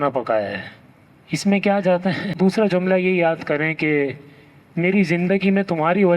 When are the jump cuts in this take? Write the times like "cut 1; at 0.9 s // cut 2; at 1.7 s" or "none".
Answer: cut 1; at 2.3 s